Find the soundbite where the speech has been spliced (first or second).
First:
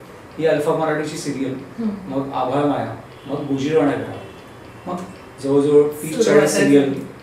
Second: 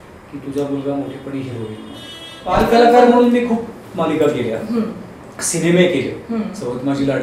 second